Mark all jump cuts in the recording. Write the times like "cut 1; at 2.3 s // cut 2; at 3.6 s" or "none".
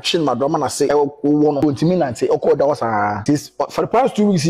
cut 1; at 0.9 s // cut 2; at 1.6 s // cut 3; at 3.2 s